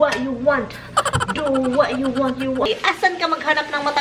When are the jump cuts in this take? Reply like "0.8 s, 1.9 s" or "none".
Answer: 2.7 s